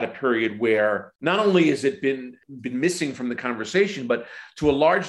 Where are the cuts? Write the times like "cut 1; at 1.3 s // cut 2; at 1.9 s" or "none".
cut 1; at 1.1 s // cut 2; at 2.4 s